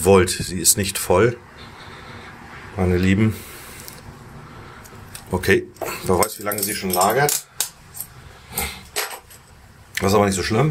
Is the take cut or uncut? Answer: uncut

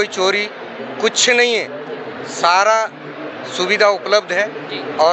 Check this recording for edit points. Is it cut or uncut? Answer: uncut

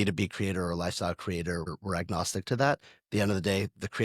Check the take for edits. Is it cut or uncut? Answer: cut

